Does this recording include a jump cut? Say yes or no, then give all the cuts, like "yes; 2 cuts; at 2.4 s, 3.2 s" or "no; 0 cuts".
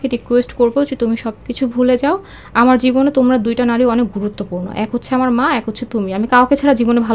no; 0 cuts